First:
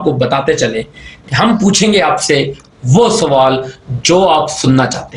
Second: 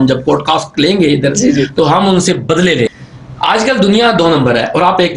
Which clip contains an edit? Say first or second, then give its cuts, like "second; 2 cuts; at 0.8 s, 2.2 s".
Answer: second; 1 cut; at 2.9 s